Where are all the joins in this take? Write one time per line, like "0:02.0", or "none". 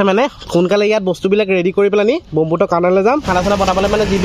0:03.3